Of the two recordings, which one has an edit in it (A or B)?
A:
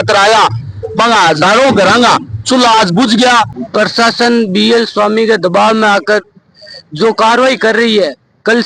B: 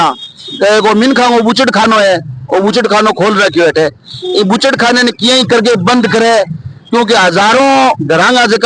A